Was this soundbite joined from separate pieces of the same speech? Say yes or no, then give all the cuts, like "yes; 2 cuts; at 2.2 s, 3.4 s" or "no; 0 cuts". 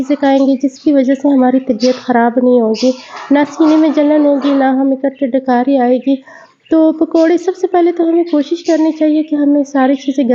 no; 0 cuts